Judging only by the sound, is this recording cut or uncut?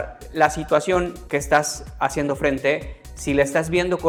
uncut